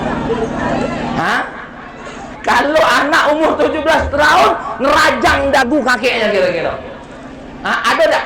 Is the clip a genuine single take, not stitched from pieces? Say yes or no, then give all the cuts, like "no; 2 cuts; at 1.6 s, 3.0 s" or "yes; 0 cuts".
no; 1 cut; at 2.3 s